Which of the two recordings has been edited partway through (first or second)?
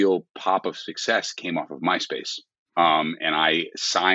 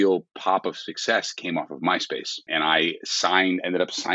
second